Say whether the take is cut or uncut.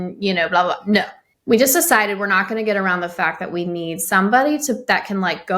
cut